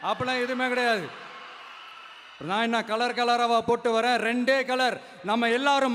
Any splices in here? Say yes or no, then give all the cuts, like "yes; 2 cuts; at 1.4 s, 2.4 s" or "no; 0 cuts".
no; 0 cuts